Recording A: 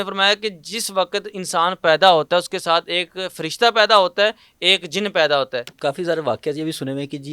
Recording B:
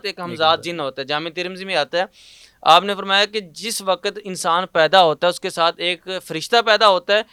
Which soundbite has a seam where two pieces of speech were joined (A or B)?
A